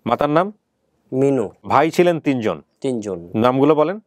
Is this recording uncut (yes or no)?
no